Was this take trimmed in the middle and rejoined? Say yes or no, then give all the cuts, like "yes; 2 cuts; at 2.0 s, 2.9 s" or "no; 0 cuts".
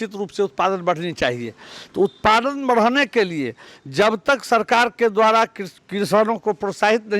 no; 0 cuts